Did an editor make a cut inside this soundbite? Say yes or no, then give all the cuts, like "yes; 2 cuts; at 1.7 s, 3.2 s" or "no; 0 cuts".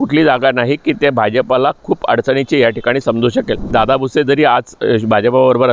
yes; 1 cut; at 3.7 s